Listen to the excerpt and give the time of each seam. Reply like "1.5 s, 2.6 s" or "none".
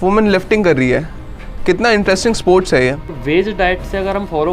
3.1 s

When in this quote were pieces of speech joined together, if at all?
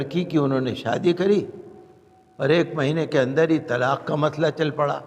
none

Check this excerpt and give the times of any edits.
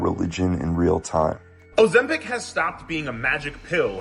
1.5 s

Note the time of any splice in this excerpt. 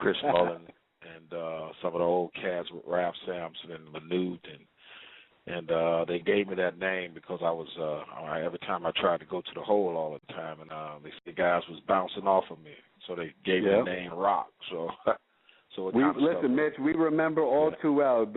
none

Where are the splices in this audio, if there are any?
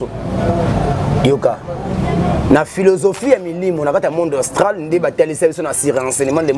none

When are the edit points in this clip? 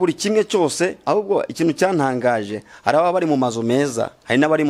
1.0 s

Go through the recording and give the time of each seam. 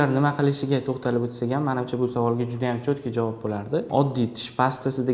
3.9 s

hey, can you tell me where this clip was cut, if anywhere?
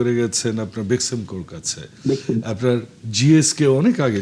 none

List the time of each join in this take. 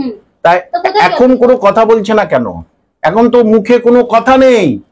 none

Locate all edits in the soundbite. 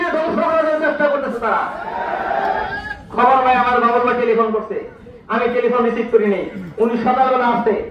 none

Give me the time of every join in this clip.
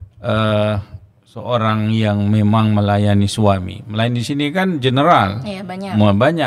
none

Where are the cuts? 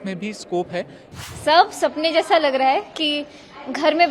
1.2 s

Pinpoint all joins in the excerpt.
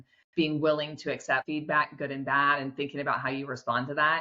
1.4 s

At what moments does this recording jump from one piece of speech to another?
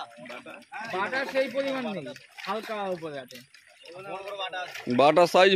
none

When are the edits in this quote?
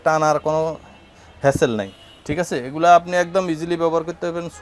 none

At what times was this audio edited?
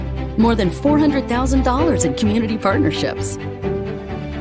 none

